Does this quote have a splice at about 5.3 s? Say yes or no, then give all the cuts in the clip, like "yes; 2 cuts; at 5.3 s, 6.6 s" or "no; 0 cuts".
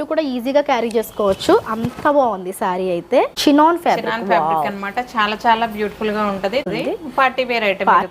no; 2 cuts; at 3.3 s, 6.6 s